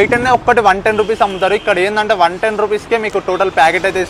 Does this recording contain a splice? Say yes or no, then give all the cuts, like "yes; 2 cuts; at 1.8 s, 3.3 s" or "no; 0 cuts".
no; 0 cuts